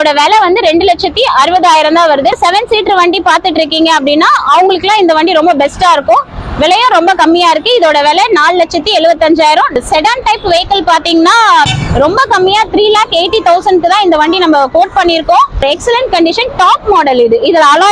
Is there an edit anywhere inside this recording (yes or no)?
yes